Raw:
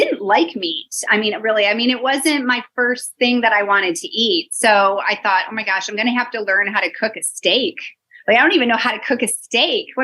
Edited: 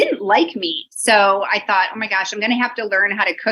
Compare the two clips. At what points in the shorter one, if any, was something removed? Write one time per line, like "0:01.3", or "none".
0:00.9